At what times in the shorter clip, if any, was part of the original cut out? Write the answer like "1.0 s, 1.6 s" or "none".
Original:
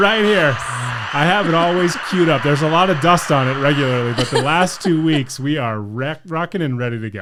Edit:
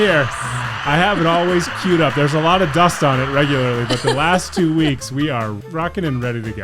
5.6 s